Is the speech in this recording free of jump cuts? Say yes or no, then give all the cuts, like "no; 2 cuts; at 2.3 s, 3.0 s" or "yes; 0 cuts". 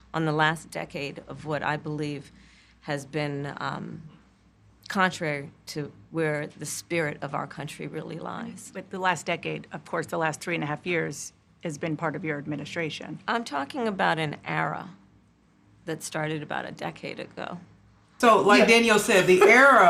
yes; 0 cuts